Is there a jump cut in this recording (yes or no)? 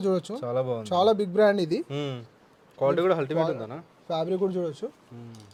no